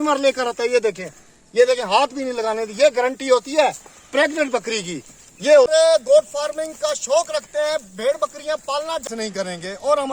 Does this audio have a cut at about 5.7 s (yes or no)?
yes